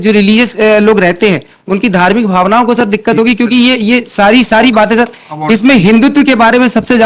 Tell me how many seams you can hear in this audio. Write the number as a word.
zero